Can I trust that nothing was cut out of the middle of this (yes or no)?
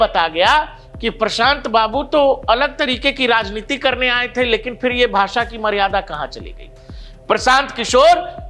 yes